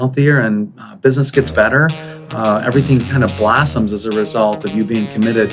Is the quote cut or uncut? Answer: uncut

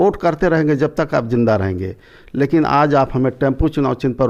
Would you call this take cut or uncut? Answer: uncut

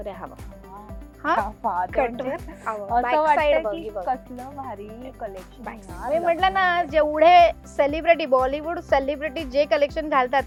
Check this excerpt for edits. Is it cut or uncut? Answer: uncut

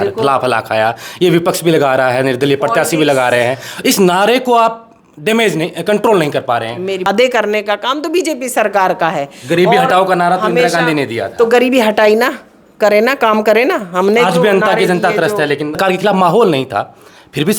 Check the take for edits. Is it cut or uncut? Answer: cut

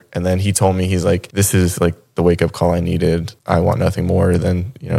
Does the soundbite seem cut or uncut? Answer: cut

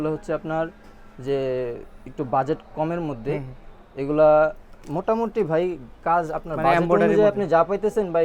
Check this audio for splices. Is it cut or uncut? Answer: uncut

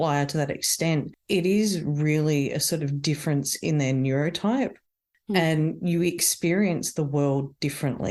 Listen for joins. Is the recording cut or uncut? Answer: uncut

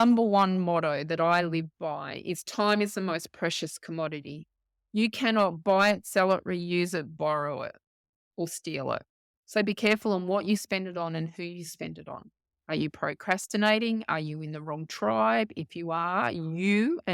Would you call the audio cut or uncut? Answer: uncut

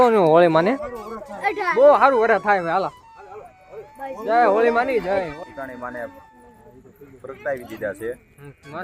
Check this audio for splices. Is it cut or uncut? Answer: cut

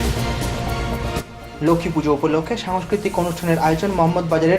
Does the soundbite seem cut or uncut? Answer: cut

